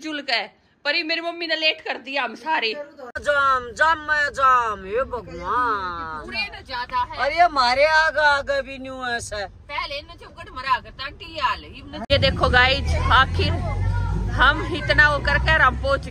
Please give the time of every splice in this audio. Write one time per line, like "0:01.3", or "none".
0:03.2
0:12.1